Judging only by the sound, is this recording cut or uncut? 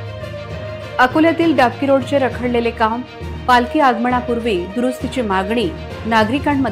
cut